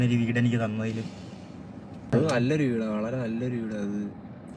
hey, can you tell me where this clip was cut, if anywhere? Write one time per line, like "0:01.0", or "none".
0:02.1